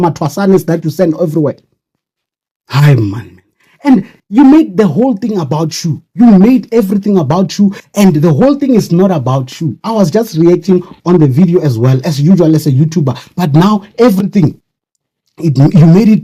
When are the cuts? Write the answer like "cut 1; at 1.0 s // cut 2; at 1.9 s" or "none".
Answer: none